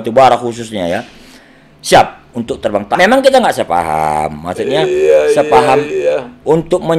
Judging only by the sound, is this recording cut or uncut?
cut